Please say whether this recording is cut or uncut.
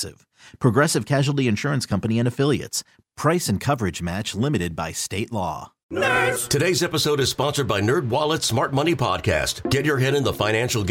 cut